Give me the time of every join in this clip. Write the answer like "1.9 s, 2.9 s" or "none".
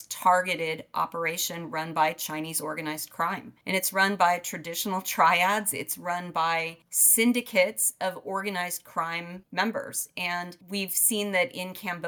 none